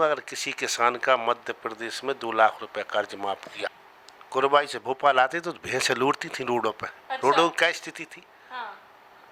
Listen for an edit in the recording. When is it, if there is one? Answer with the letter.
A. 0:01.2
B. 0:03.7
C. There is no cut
B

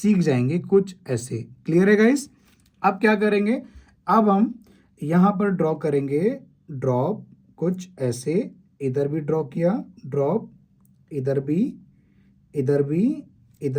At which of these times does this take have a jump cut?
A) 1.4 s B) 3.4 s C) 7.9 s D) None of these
D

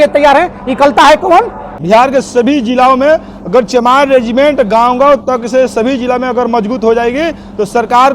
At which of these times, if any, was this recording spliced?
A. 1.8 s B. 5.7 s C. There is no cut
A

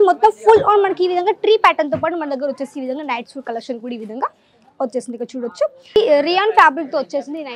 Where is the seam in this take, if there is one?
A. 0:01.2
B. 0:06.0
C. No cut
B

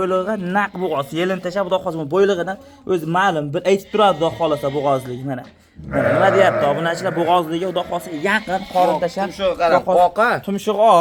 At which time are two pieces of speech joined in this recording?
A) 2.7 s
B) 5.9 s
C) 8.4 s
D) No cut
D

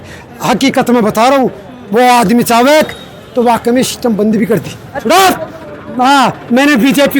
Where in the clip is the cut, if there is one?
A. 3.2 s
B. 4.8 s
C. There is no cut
B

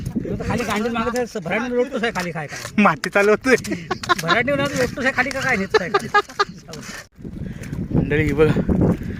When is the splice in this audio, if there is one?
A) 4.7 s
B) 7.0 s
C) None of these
B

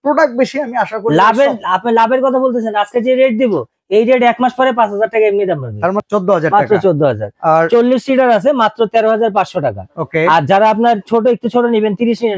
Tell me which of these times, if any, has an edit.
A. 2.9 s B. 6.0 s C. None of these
B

